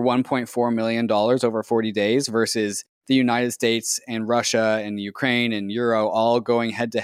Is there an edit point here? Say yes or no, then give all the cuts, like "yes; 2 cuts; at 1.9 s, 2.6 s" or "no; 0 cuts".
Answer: no; 0 cuts